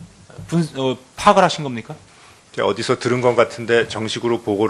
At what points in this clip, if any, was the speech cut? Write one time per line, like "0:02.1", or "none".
0:02.7